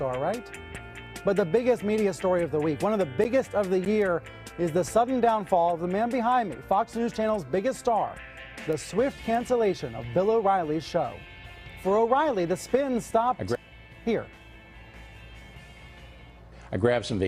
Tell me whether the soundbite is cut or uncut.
cut